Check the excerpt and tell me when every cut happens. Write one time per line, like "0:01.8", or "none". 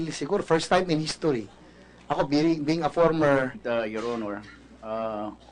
none